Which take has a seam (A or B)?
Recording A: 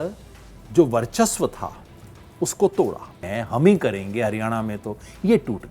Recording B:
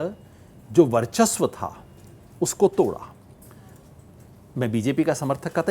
A